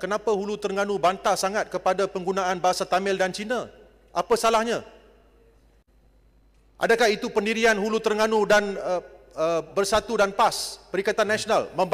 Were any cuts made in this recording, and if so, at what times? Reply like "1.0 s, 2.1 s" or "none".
none